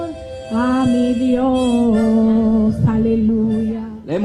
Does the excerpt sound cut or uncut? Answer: uncut